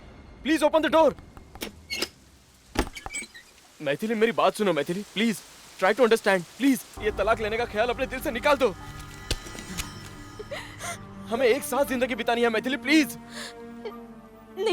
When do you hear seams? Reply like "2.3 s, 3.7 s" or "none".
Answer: 6.9 s